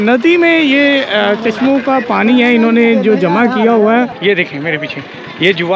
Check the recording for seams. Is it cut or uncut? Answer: cut